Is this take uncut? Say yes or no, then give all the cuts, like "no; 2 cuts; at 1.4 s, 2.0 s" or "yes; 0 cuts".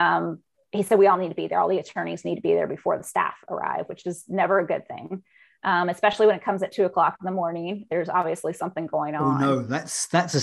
yes; 0 cuts